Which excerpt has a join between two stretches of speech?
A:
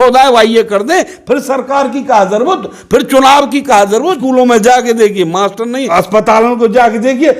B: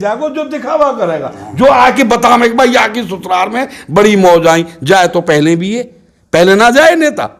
A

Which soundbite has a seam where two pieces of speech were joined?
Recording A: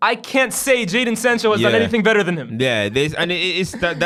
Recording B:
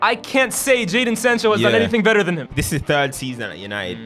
B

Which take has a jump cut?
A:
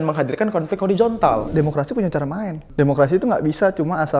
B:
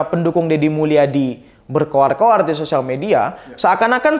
A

